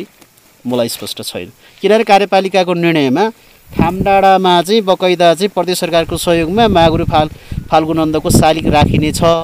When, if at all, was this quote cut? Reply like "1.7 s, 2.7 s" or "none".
none